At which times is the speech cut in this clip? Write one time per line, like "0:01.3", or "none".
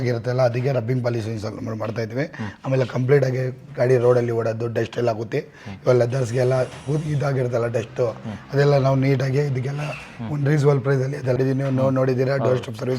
0:11.4

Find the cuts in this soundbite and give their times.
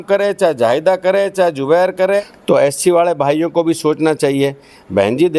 0:02.3

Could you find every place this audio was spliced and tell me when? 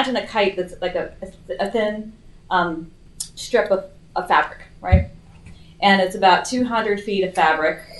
none

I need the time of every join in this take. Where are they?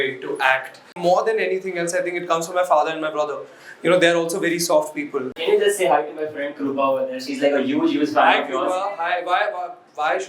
0:00.9
0:05.3

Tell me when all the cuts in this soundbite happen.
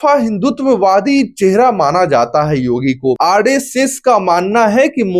0:03.2

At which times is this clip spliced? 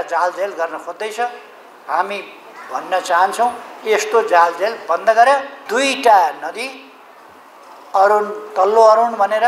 0:05.6

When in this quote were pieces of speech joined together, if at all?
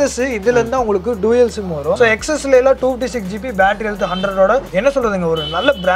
0:02.0
0:04.7

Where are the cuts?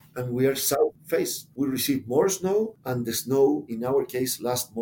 0:03.7

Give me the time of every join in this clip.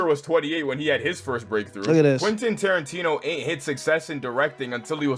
none

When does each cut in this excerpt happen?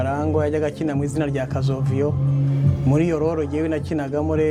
none

